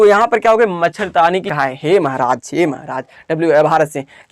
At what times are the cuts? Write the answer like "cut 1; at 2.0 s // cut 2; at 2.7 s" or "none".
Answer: cut 1; at 1.5 s